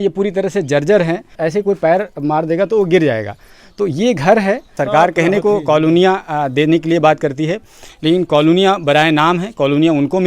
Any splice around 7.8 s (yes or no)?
no